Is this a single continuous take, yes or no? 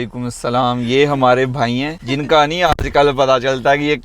no